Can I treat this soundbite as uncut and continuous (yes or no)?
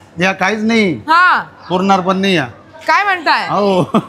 yes